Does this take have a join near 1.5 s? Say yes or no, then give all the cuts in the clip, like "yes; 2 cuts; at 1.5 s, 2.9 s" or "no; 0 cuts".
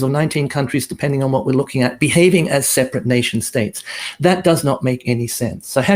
no; 0 cuts